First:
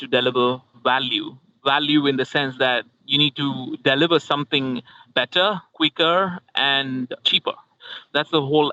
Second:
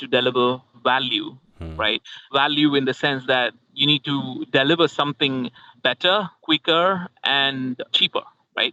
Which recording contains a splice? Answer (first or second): first